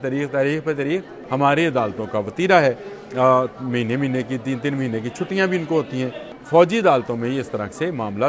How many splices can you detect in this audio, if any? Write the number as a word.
two